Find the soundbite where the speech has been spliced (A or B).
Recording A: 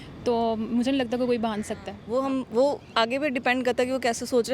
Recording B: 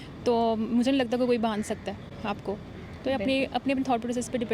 A